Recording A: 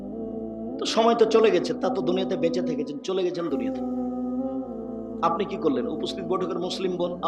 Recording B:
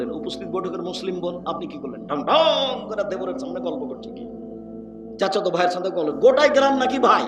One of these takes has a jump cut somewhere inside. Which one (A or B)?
A